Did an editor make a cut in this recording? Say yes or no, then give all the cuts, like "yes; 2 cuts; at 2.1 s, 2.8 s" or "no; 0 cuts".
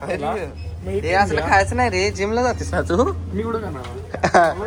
no; 0 cuts